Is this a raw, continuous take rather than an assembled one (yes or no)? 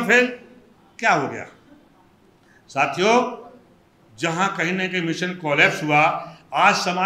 yes